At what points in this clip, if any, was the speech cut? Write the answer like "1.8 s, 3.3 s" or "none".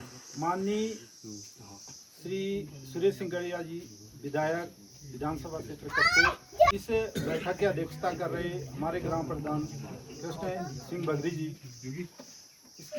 6.7 s